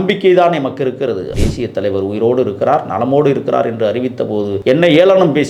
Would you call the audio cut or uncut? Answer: cut